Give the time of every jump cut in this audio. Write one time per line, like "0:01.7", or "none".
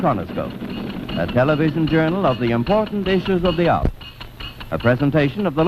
0:02.5